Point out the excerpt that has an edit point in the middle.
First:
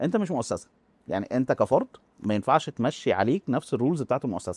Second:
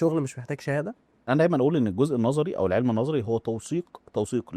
second; 1 cut; at 1.1 s

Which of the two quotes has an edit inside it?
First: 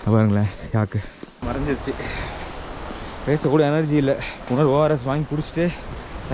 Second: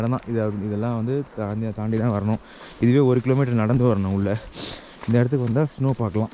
first; 2 cuts; at 1.4 s, 4.3 s

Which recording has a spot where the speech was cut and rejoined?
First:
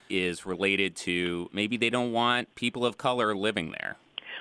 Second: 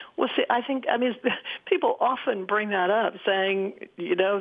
first; 1 cut; at 1.5 s

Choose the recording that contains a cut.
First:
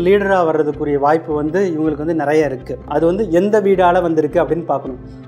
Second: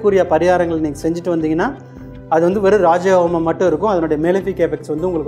first; 1 cut; at 2.8 s

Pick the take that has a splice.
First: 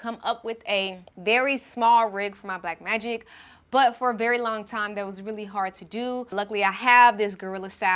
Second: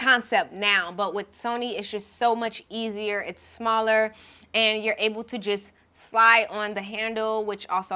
first; 2 cuts; at 1.1 s, 6.3 s

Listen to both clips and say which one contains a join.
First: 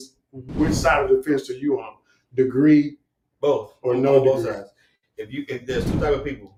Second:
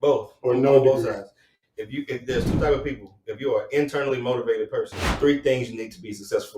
second; 1 cut; at 5.0 s

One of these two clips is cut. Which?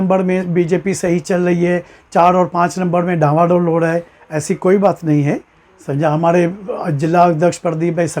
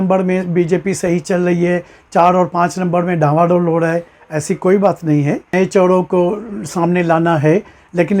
second; 1 cut; at 5.5 s

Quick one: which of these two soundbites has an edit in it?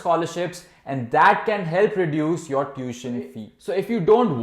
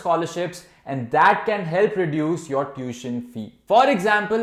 first; 1 cut; at 3.5 s

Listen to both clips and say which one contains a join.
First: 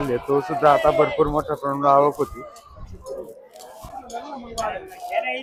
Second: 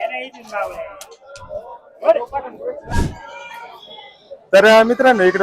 second; 1 cut; at 2.9 s

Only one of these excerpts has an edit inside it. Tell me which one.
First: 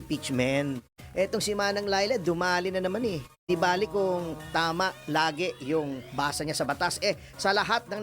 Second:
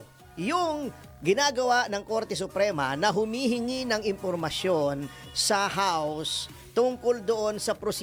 first; 2 cuts; at 1.0 s, 3.5 s

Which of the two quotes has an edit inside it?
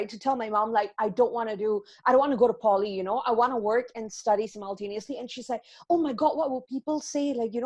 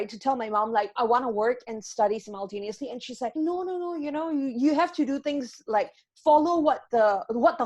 second; 2 cuts; at 0.9 s, 3.3 s

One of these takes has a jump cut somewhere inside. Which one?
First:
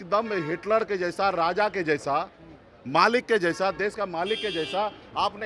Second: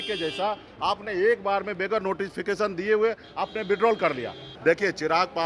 second; 1 cut; at 4.4 s

